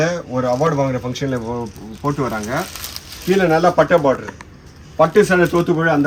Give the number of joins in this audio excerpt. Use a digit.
0